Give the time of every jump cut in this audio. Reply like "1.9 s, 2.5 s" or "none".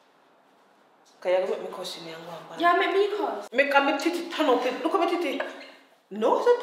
3.4 s